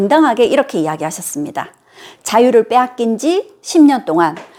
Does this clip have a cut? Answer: no; 0 cuts

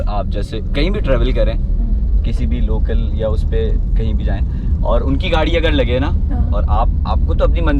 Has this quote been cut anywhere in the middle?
no; 0 cuts

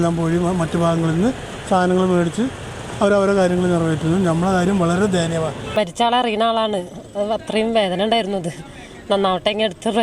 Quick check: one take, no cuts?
no; 1 cut; at 5.6 s

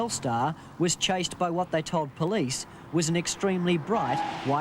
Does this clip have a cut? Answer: yes; 1 cut; at 1.1 s

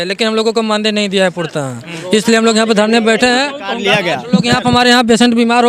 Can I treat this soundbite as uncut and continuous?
yes; 0 cuts

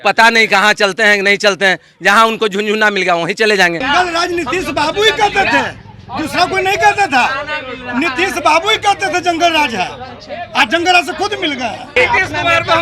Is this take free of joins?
no; 2 cuts; at 3.8 s, 12.0 s

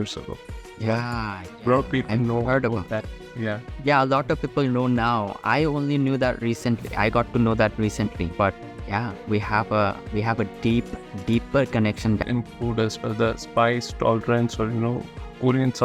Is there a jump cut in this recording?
yes; 1 cut; at 12.2 s

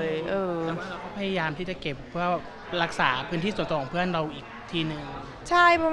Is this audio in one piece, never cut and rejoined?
yes; 0 cuts

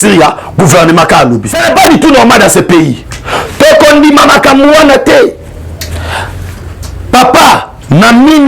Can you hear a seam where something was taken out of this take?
yes; 1 cut; at 1.5 s

